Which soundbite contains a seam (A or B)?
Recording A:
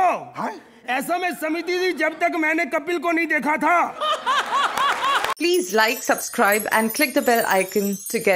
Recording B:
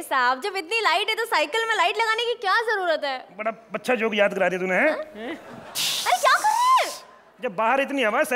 A